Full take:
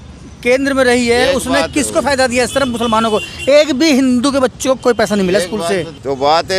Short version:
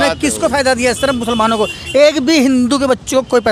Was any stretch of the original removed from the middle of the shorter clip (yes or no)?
no